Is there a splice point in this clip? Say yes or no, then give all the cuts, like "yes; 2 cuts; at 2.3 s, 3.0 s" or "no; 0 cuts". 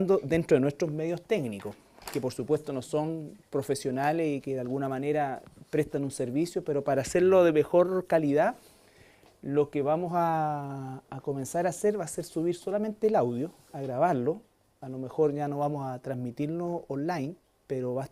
yes; 1 cut; at 4.6 s